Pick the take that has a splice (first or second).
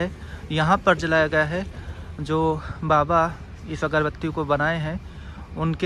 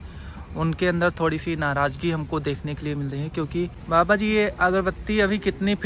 second